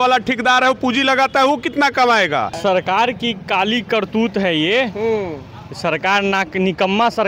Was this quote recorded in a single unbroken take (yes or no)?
no